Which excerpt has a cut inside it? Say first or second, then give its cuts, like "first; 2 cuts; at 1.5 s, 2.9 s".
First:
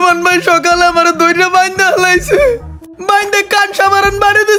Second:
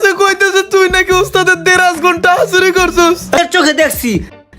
second; 1 cut; at 3.4 s